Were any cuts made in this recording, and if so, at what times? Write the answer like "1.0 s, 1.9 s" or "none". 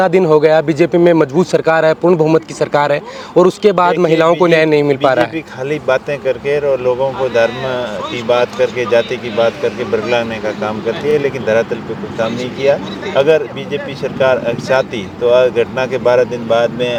none